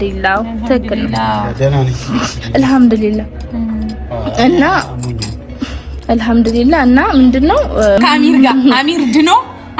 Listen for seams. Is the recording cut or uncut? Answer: cut